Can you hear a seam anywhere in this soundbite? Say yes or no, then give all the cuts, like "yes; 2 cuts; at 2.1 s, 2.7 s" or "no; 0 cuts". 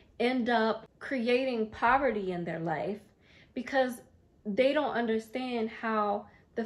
yes; 1 cut; at 0.9 s